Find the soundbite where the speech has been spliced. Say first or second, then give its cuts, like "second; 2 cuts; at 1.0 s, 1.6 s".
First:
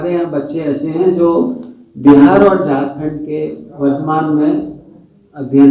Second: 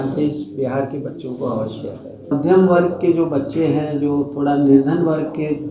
second; 1 cut; at 2.3 s